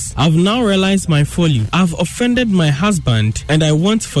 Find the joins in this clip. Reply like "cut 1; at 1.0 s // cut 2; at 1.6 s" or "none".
none